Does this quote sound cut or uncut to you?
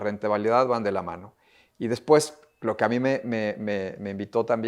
uncut